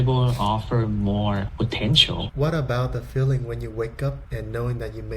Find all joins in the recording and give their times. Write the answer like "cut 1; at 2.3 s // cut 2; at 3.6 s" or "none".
cut 1; at 2.3 s